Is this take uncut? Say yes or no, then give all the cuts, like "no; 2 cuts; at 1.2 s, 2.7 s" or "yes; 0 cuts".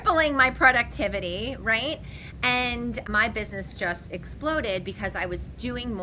yes; 0 cuts